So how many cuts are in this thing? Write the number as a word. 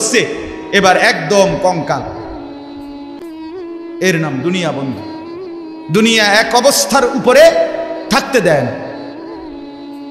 two